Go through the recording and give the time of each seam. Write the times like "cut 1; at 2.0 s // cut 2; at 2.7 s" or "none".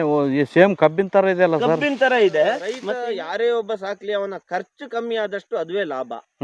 cut 1; at 2.7 s